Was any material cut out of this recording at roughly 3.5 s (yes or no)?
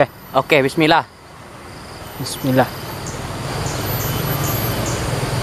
yes